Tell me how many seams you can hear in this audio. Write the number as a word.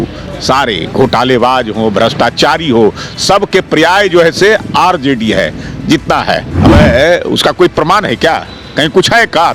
one